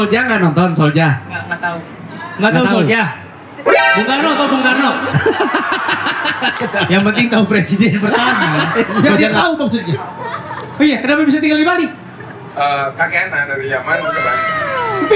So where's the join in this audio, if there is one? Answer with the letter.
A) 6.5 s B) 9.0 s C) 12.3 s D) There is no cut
B